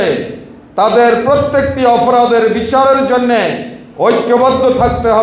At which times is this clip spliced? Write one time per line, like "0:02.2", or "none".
none